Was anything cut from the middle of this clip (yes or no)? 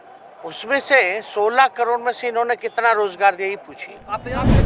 no